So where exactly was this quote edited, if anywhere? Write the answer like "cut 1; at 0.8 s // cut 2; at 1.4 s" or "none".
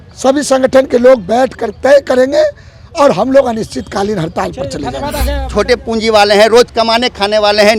cut 1; at 5.4 s